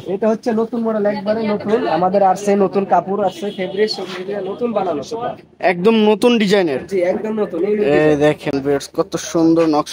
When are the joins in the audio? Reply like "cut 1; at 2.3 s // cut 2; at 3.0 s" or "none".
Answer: none